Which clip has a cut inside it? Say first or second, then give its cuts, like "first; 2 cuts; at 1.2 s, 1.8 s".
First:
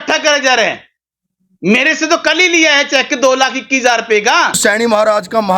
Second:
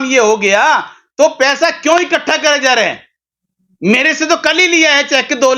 first; 1 cut; at 4.6 s